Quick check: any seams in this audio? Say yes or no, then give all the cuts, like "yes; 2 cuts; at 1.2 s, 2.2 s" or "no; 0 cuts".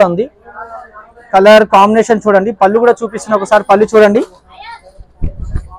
no; 0 cuts